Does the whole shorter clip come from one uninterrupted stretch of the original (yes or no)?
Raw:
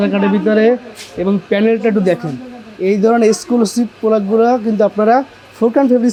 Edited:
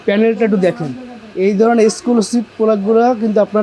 yes